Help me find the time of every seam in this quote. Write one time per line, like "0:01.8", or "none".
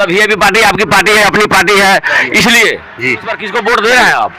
0:03.4

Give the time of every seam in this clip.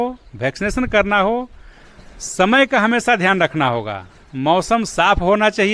none

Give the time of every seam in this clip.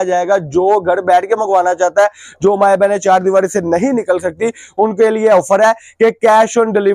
none

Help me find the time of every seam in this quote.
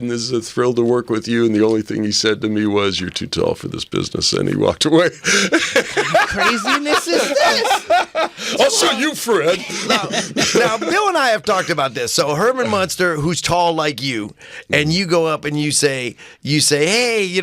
none

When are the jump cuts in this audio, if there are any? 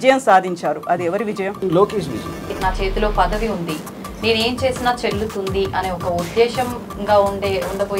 0:01.6
0:02.5

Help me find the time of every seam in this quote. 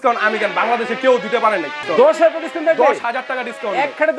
0:01.8

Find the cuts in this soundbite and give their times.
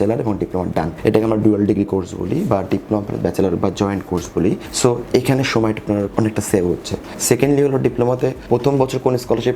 0:00.9
0:04.7
0:06.1
0:07.1
0:08.4

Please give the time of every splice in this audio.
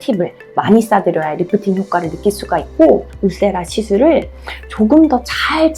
0:03.1

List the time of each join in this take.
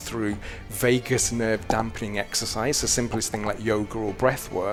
none

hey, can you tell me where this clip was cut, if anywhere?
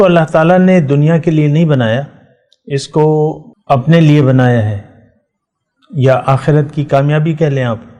0:03.5

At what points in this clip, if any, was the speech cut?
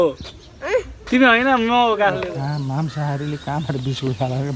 0:02.3

